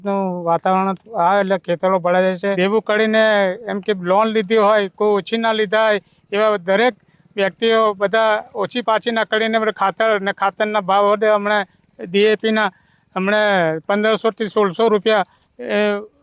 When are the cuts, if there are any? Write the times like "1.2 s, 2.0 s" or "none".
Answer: 2.6 s